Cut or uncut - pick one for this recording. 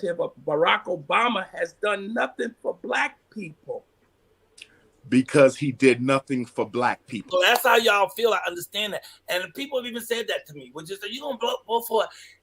cut